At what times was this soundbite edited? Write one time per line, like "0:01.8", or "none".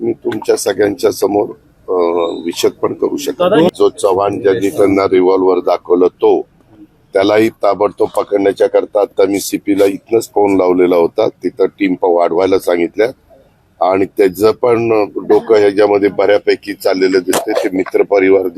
0:03.7